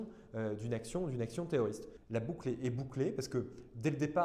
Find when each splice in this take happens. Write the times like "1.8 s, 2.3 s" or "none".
1.9 s